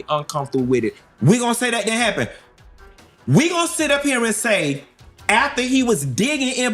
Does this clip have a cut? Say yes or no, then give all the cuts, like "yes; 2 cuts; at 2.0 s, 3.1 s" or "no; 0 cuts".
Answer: yes; 1 cut; at 1.0 s